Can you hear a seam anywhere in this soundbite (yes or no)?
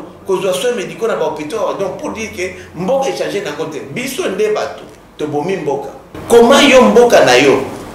yes